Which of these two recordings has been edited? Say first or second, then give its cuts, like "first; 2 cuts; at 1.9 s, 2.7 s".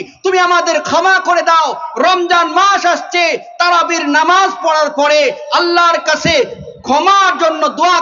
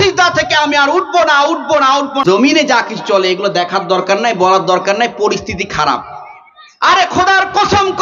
second; 1 cut; at 2.2 s